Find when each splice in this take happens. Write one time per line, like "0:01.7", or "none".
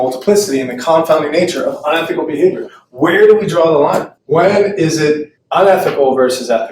none